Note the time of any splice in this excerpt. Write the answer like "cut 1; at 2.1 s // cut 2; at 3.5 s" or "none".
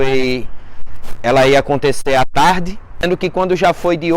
cut 1; at 3.0 s